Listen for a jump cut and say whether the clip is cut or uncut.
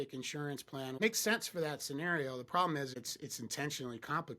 cut